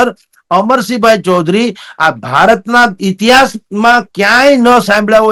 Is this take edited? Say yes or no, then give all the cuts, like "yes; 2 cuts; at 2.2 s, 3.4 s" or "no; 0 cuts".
no; 0 cuts